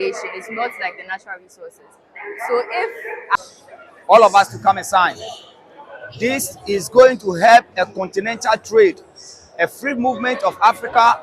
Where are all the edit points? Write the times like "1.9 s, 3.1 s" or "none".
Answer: 3.3 s